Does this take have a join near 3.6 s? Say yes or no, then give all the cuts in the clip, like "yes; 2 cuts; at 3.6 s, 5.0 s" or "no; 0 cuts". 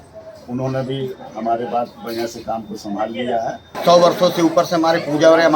yes; 1 cut; at 3.6 s